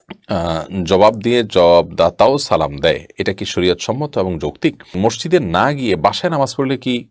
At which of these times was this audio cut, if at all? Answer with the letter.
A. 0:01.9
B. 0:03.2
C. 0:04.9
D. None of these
C